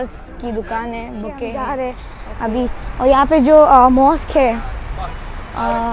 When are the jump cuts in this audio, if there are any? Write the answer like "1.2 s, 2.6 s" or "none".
1.5 s